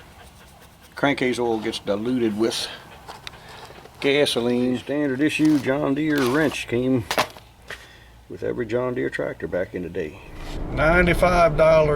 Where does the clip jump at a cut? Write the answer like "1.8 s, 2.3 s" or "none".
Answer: 4.8 s, 10.6 s